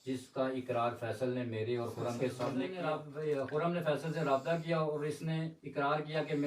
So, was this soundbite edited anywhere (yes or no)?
yes